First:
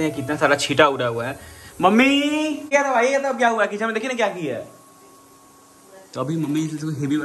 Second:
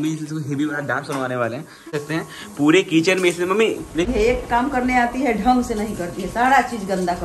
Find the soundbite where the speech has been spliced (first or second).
second